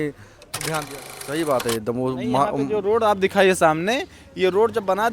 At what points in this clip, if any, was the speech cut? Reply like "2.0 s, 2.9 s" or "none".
1.2 s